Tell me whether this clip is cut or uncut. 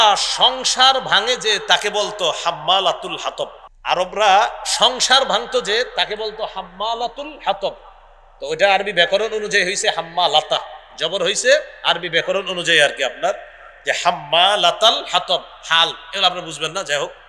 cut